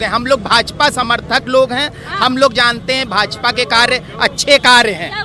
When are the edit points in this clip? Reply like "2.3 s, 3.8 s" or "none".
none

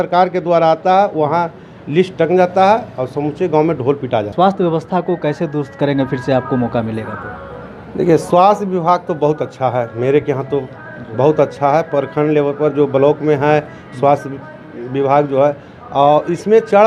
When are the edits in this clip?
none

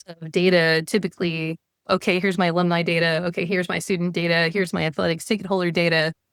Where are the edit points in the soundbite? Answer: none

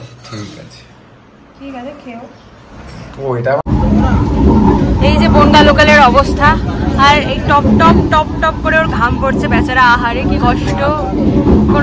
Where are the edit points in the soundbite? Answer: 3.6 s

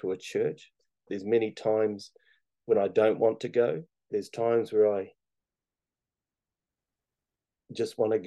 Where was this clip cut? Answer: 1.1 s, 4.1 s

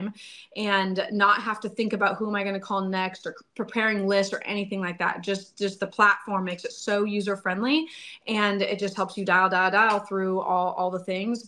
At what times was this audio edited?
none

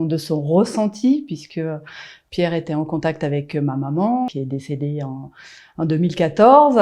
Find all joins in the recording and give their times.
4.3 s

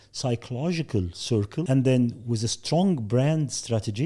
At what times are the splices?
1.7 s

